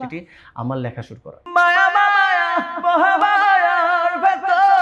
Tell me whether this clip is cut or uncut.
cut